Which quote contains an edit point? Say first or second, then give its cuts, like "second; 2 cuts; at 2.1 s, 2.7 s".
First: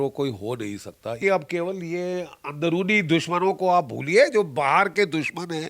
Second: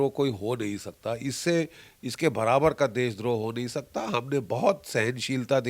first; 1 cut; at 1.2 s